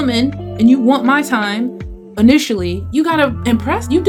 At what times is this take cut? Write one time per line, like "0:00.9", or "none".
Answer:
none